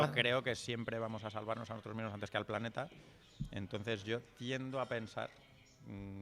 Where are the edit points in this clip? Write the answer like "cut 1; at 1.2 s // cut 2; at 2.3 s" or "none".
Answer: none